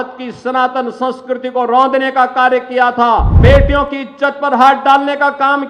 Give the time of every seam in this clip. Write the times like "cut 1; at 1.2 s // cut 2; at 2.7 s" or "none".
cut 1; at 3.3 s